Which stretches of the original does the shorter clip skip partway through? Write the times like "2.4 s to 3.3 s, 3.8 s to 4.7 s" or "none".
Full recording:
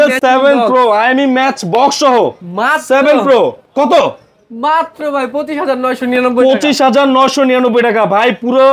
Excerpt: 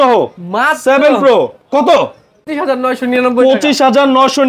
4.5 s to 5.5 s